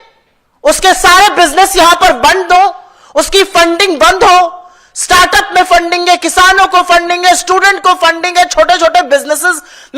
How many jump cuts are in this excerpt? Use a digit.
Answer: 0